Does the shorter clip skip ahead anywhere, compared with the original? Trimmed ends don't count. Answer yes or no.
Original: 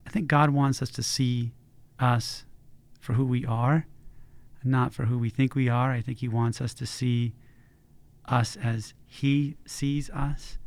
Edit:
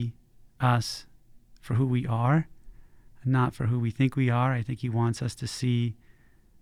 no